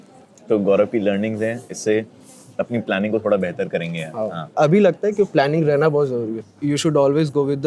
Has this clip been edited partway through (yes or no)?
yes